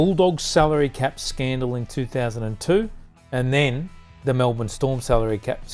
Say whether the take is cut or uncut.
uncut